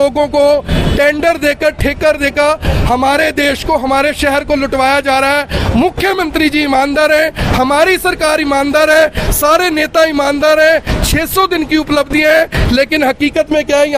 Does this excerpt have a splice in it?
no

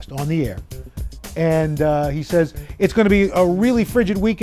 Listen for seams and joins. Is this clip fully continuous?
yes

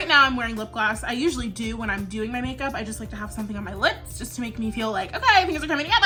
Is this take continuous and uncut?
yes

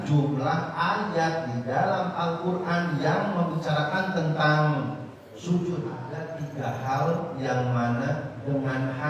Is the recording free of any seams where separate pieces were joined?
no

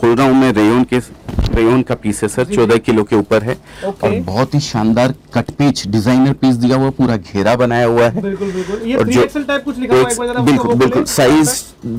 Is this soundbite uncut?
yes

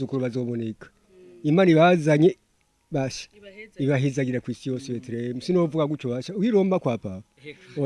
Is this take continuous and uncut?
yes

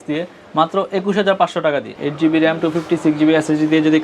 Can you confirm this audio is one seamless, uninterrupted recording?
no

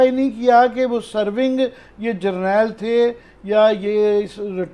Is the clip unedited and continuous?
yes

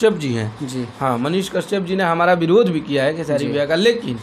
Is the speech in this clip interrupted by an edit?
no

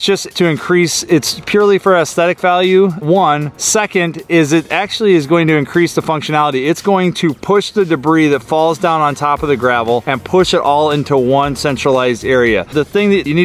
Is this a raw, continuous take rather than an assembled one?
yes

